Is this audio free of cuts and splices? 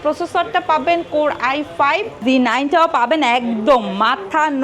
no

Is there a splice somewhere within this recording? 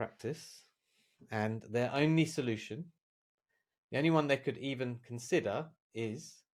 no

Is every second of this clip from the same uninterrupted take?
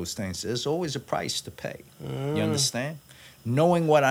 yes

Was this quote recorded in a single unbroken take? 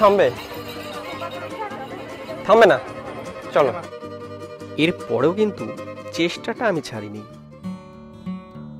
yes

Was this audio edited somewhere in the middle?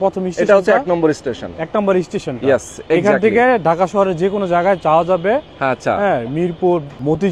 no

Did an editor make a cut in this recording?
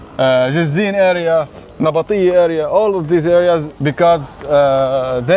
yes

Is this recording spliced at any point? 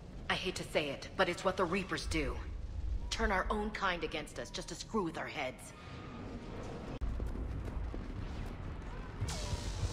no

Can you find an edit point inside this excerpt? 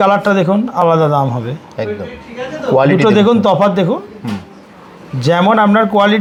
no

